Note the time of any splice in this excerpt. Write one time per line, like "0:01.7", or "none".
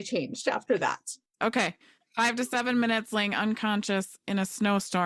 0:01.3